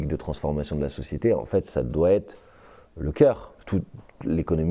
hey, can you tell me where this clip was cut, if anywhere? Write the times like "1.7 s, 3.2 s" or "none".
3.5 s